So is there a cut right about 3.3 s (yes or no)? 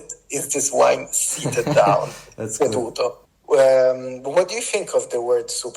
yes